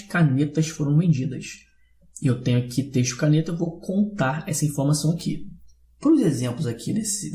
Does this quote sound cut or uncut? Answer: uncut